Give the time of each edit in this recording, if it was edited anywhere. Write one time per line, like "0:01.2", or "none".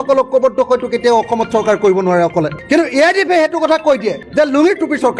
none